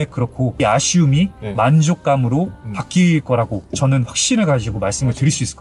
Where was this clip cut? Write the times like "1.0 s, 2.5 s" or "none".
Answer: none